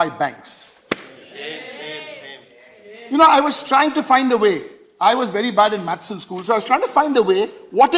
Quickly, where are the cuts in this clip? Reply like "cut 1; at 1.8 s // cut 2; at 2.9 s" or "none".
none